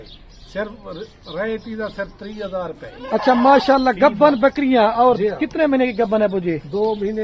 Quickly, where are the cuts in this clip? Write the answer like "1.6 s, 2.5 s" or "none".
none